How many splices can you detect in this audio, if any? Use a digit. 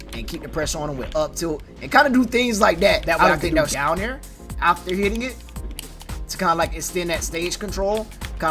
1